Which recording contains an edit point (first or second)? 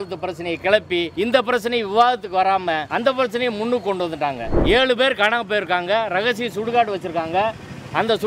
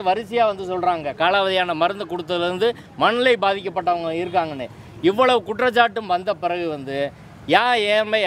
first